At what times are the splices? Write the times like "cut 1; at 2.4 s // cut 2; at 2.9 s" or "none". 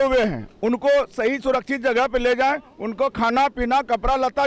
none